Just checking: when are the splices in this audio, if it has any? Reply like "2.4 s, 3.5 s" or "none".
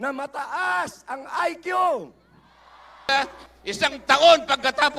3.1 s